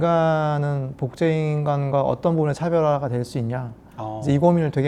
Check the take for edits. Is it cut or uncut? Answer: uncut